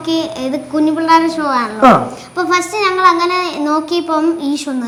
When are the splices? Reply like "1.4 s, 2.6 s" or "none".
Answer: none